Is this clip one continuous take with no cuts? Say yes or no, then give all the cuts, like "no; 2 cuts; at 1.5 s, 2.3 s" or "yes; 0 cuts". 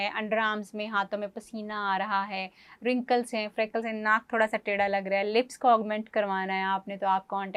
yes; 0 cuts